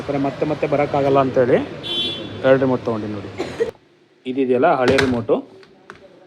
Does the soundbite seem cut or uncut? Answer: cut